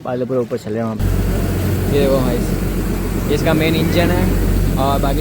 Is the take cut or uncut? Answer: cut